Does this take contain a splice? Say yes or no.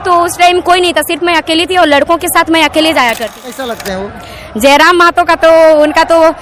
yes